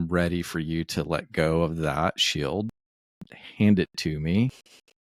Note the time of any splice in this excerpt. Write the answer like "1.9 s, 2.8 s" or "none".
none